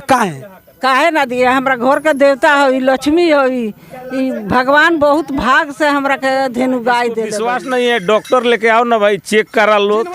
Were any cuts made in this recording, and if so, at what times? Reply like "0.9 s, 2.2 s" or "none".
7.4 s